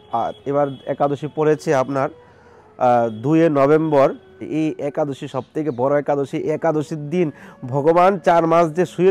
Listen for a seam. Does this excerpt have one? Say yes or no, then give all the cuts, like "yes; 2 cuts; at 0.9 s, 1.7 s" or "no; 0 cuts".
yes; 1 cut; at 4.4 s